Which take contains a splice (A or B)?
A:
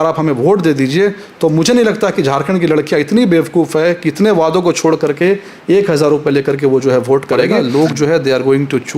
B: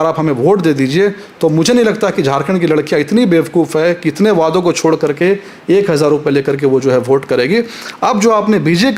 A